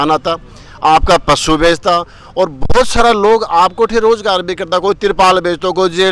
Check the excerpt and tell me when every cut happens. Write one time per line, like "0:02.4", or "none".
none